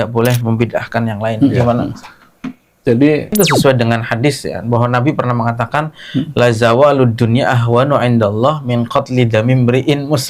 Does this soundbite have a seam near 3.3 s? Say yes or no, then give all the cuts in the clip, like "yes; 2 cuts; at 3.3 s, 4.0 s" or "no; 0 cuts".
yes; 1 cut; at 3.3 s